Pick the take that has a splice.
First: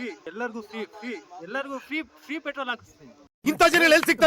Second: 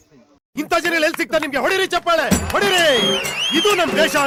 first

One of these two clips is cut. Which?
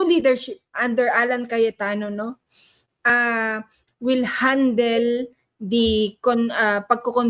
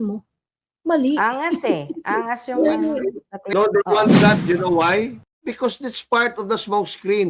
second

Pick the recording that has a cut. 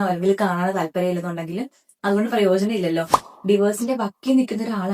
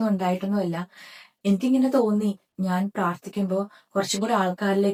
first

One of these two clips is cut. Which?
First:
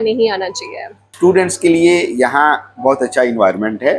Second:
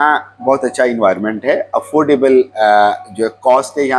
first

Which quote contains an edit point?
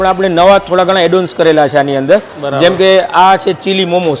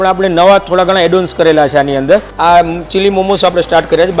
second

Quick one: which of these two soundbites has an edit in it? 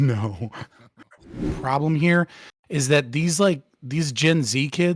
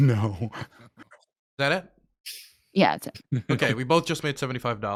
first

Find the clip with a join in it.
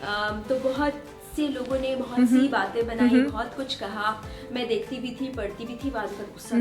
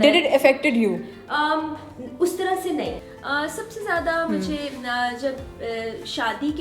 second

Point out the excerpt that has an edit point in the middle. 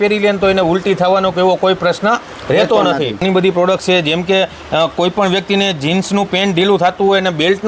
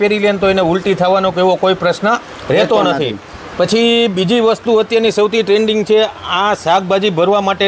first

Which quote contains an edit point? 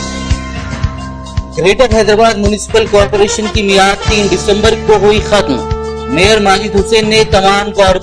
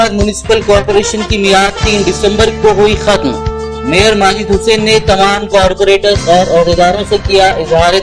first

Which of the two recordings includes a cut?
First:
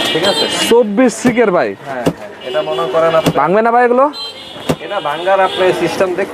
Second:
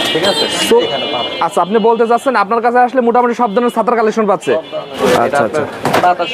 second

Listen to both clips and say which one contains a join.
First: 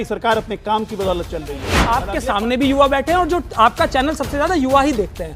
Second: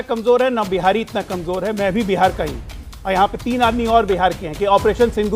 first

